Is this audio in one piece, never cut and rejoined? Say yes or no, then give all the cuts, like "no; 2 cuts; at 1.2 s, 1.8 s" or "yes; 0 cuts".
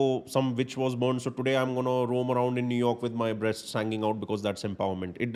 yes; 0 cuts